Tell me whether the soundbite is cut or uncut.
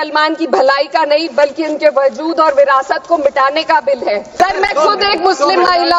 cut